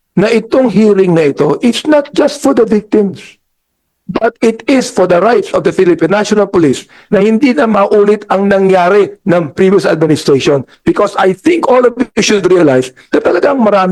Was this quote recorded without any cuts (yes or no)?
yes